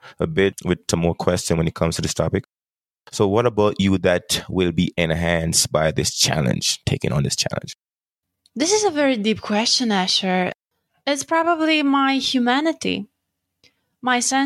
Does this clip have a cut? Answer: yes; 1 cut; at 10.7 s

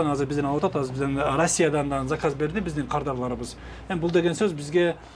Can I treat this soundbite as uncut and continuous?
yes; 0 cuts

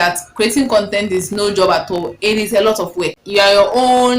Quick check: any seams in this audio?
yes; 1 cut; at 3.2 s

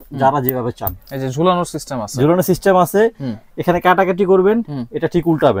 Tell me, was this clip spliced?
no; 0 cuts

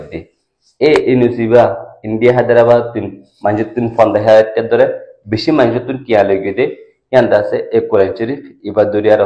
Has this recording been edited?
no; 0 cuts

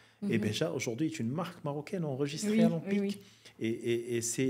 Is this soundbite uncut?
yes; 0 cuts

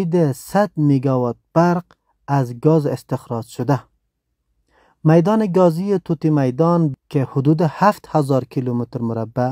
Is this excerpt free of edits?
no; 1 cut; at 6.9 s

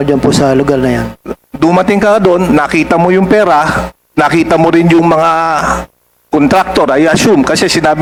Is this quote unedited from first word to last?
yes; 0 cuts

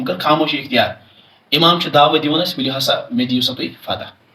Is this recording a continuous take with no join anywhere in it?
yes; 0 cuts

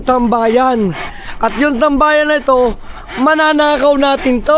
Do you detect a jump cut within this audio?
no; 0 cuts

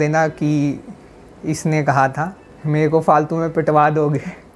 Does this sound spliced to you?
yes; 1 cut; at 2.5 s

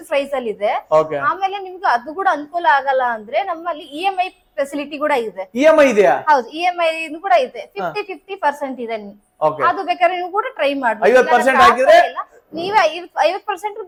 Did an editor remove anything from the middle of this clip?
no; 0 cuts

